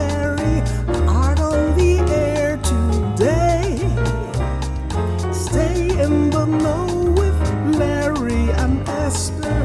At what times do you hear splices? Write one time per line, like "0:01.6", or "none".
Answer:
none